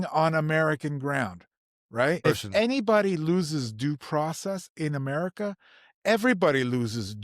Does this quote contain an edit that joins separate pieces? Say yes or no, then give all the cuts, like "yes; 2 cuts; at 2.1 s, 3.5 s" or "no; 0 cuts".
yes; 1 cut; at 2.3 s